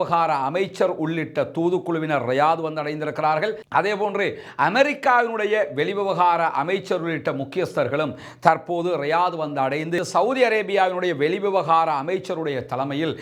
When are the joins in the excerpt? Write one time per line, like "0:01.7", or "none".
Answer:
none